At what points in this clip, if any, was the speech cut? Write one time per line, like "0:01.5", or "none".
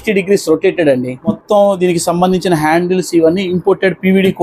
none